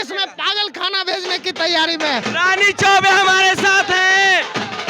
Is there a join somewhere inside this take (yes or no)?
yes